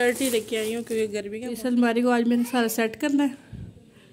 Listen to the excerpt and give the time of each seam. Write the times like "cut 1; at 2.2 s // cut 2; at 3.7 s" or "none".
cut 1; at 1.5 s